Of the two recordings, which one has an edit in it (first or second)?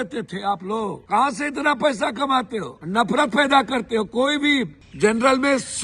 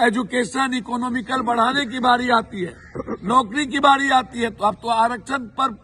first